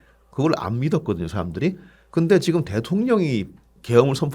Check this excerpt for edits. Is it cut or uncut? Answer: uncut